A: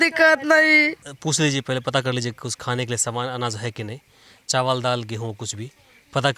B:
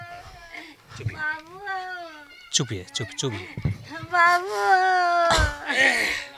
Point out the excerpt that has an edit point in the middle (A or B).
A